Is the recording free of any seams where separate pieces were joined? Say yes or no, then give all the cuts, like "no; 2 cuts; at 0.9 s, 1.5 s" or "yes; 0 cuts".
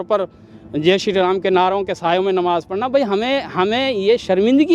yes; 0 cuts